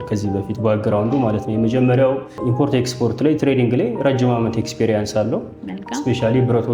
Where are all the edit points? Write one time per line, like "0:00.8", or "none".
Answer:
0:02.4